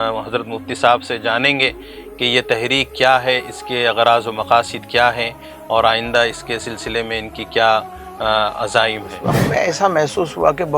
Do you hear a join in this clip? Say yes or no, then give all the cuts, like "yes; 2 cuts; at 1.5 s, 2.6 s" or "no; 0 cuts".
yes; 1 cut; at 9.4 s